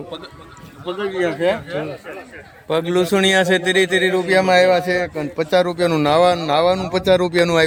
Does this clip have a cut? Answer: no; 0 cuts

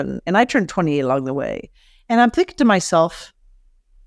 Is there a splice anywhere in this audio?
no; 0 cuts

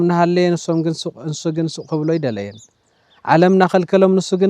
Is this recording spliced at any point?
no; 0 cuts

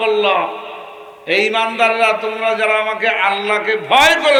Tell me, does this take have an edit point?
no; 0 cuts

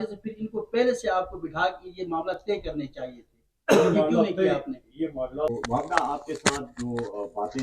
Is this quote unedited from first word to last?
no; 1 cut; at 5.3 s

